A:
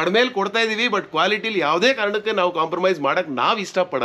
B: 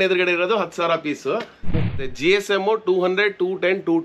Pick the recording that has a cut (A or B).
B